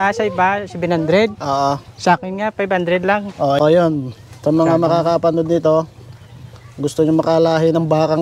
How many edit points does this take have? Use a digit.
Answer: 1